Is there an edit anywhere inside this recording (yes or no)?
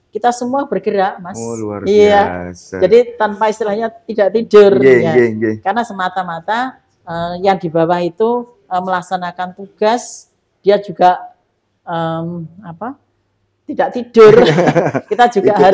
no